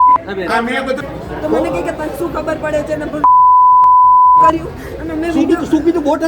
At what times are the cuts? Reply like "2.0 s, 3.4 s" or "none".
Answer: 1.1 s